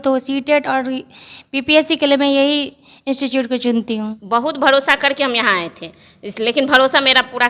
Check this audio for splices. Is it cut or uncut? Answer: cut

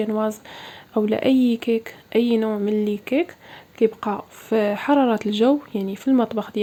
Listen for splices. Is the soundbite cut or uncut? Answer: uncut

